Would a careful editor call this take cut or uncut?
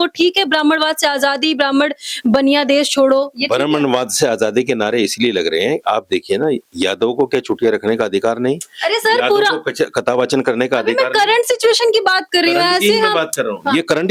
uncut